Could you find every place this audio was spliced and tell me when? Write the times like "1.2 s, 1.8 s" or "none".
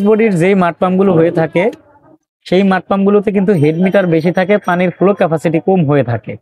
none